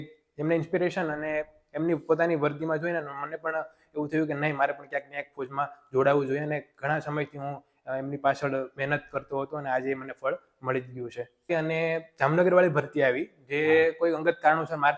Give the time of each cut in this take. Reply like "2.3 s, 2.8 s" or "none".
11.5 s